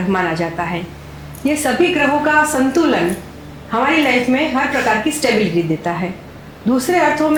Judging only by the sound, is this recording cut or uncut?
uncut